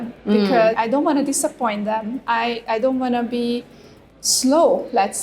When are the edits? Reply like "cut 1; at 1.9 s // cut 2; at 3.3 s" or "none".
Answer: cut 1; at 0.8 s // cut 2; at 4.1 s